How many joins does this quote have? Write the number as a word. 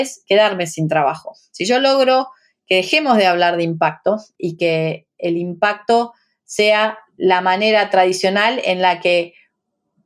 two